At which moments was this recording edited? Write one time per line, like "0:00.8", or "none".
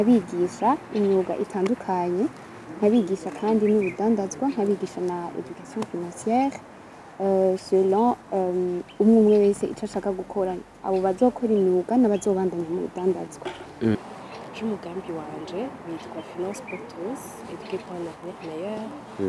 0:13.9